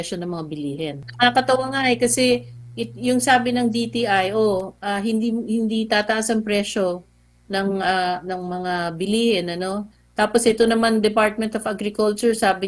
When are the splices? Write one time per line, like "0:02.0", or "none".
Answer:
0:01.1

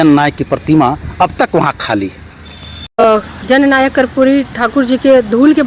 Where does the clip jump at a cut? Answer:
0:03.0

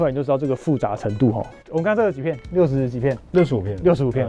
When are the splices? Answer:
0:01.5

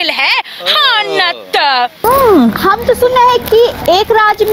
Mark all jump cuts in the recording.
0:02.0

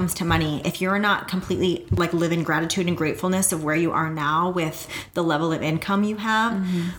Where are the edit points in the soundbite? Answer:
0:01.9

